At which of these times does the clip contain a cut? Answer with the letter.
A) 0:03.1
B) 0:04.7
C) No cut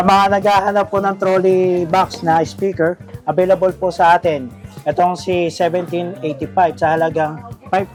C